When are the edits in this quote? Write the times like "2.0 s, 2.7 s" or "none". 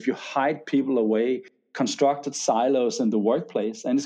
1.5 s

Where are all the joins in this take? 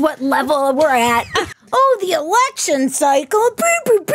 1.5 s

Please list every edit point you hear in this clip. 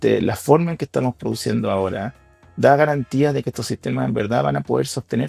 none

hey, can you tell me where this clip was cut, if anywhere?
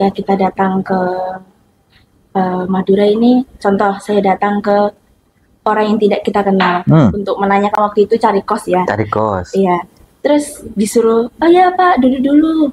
none

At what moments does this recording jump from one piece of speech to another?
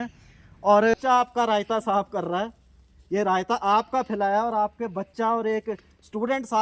0.9 s

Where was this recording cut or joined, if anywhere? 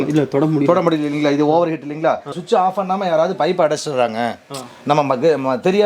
2.3 s

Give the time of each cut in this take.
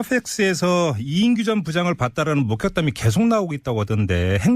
2.5 s

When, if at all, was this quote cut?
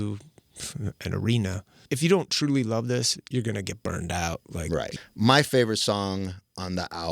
1.8 s, 4.9 s

